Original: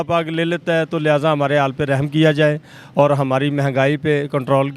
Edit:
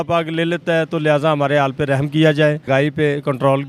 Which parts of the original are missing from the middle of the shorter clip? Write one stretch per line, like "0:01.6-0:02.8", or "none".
0:02.6-0:03.7